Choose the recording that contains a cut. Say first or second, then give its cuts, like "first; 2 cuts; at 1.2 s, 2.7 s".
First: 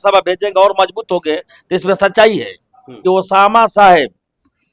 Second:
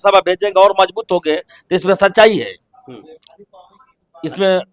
first; 1 cut; at 2.9 s